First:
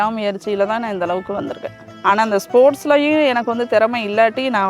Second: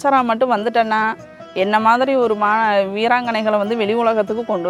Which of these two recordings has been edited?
first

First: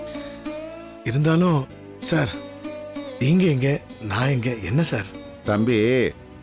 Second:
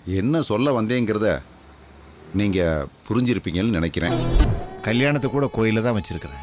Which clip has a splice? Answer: second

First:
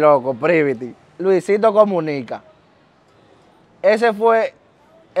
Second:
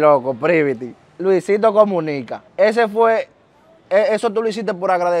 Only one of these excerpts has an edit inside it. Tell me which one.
second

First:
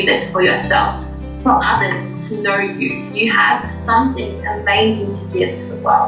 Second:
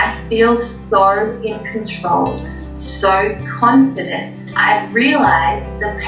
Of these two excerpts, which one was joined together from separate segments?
second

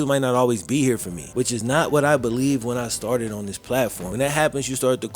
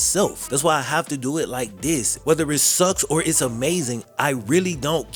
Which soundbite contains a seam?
first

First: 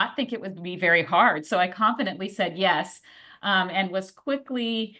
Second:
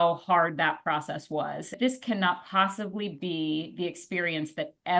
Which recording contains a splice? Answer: second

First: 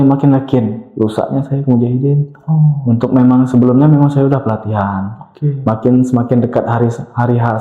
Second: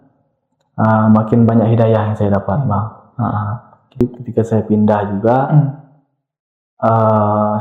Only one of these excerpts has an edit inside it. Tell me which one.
second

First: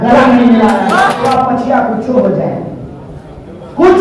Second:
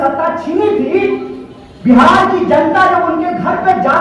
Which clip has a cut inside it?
first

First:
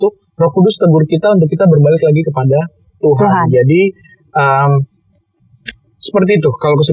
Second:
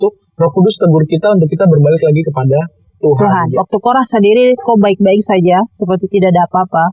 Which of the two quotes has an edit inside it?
second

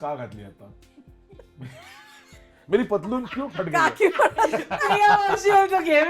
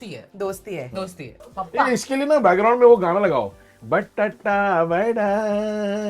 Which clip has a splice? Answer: second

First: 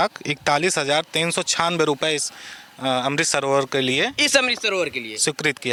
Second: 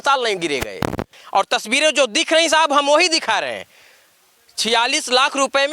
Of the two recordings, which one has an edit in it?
second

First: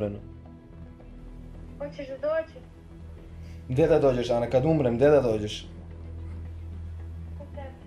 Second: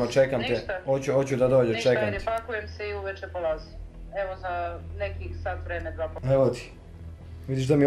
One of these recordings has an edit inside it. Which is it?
second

